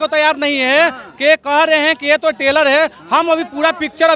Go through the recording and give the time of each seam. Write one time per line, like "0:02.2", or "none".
none